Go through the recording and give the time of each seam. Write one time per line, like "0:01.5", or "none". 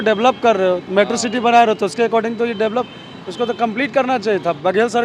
none